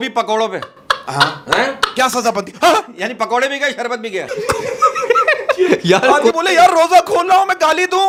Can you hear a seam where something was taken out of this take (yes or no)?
no